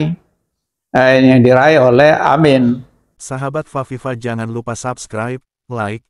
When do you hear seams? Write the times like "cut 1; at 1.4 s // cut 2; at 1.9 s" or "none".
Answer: cut 1; at 3.2 s